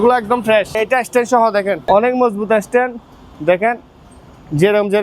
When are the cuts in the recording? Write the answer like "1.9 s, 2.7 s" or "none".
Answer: 0.7 s, 1.8 s